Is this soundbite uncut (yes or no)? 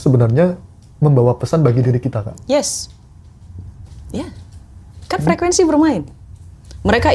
yes